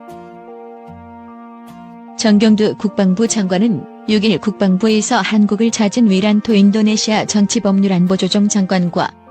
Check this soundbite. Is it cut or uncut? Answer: cut